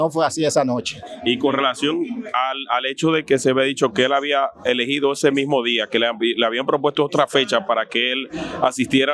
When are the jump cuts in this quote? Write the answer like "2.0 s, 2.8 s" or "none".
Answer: none